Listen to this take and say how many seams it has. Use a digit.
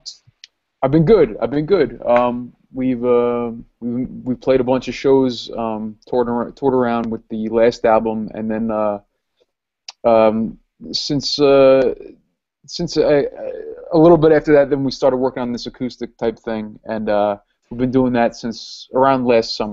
0